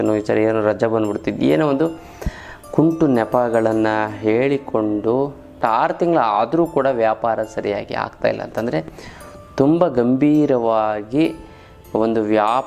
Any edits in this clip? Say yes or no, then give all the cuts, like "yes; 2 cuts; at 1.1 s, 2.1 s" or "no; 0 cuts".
yes; 1 cut; at 5.6 s